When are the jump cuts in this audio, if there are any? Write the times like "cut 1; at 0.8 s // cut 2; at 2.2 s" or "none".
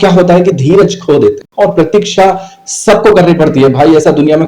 cut 1; at 1.5 s